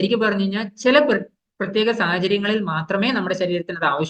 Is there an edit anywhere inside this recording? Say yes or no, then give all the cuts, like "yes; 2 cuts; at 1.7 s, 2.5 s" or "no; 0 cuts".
no; 0 cuts